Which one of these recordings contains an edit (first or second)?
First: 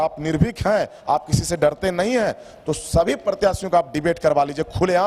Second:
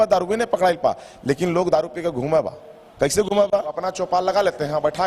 second